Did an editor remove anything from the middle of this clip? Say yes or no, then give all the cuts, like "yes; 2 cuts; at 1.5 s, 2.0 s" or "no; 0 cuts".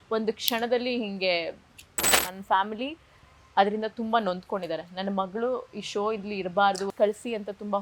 yes; 2 cuts; at 2.1 s, 6.9 s